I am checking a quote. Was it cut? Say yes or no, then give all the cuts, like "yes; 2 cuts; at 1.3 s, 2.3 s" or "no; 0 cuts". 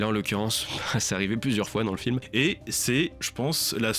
yes; 1 cut; at 2.2 s